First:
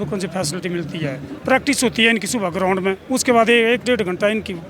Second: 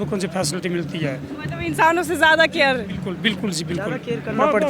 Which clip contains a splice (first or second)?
first